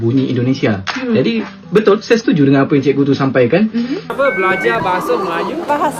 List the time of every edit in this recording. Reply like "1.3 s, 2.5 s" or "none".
4.1 s